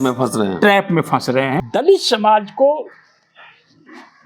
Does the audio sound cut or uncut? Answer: cut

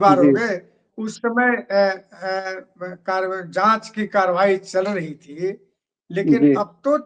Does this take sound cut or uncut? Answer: uncut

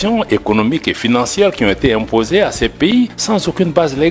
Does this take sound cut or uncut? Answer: cut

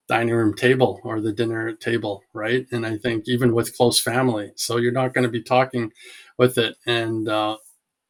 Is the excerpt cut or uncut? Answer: uncut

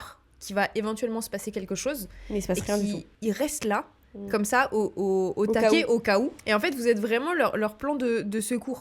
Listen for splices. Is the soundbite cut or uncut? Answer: cut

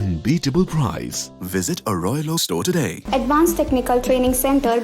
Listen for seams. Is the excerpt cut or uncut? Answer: cut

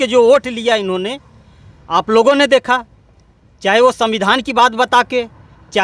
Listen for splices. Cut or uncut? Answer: uncut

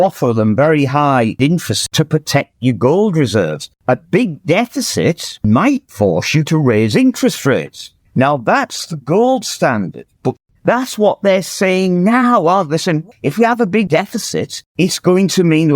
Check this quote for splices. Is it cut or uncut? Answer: cut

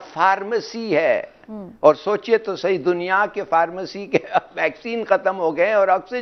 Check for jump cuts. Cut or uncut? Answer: uncut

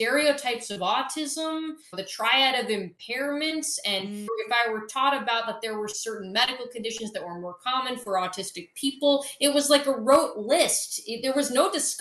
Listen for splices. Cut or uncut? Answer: cut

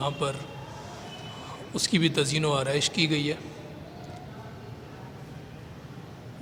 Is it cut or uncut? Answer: uncut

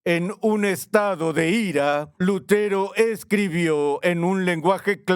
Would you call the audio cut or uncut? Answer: cut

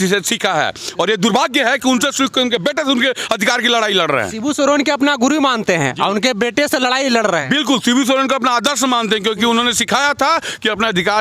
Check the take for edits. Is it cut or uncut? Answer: uncut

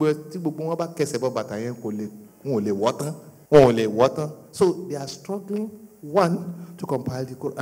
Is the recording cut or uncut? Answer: cut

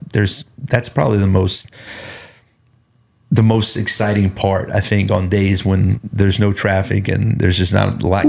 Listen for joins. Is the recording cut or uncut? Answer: uncut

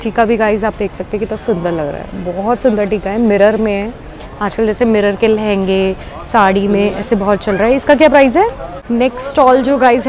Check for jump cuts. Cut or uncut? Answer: cut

